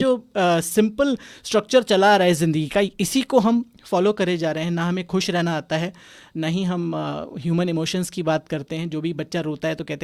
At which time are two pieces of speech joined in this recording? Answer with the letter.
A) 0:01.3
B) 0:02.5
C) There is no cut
C